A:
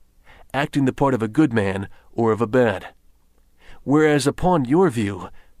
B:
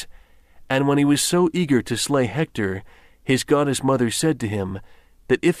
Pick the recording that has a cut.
B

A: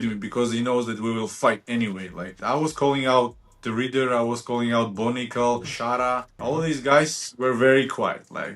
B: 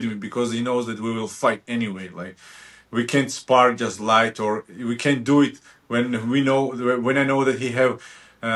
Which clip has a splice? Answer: A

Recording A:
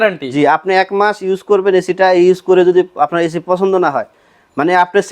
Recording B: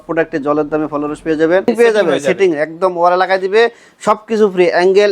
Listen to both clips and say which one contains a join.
B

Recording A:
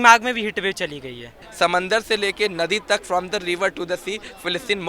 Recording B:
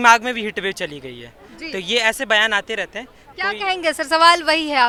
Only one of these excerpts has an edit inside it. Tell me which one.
A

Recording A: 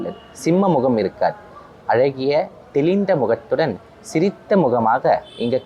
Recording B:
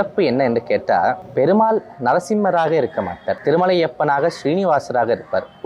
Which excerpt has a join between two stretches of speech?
B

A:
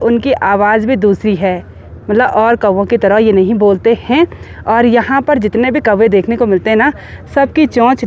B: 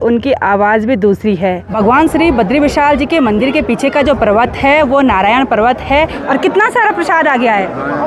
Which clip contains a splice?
B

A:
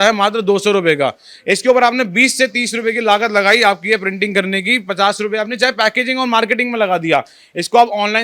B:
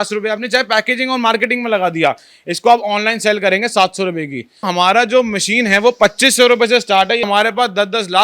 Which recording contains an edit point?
B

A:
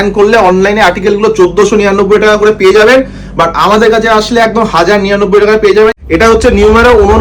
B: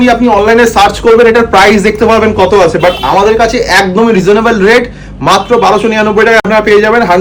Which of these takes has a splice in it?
A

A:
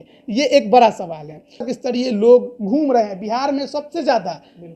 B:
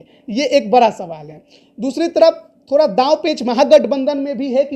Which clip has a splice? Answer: A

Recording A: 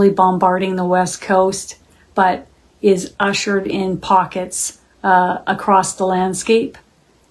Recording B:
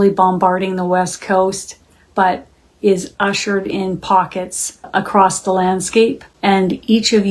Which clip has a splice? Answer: B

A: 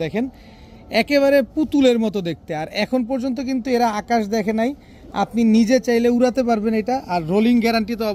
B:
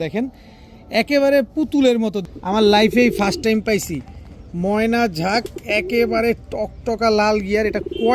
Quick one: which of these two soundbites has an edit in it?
B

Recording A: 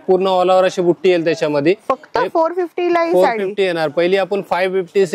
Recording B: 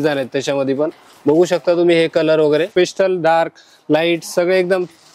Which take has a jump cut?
B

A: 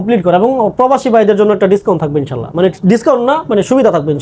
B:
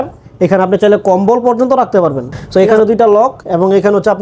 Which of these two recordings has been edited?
B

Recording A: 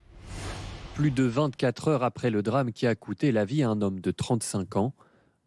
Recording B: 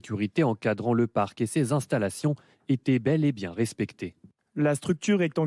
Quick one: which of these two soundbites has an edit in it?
A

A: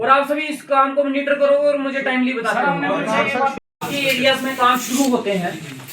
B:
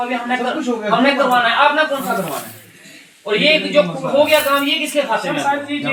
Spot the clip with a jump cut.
A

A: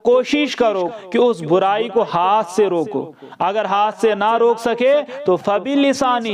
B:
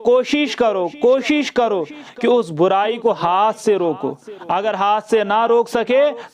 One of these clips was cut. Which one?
A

